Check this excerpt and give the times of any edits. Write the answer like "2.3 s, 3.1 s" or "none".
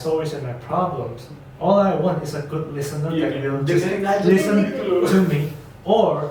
none